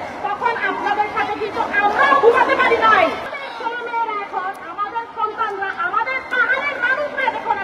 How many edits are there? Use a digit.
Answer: 1